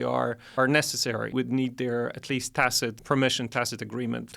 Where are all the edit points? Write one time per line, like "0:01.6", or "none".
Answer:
0:01.3
0:03.0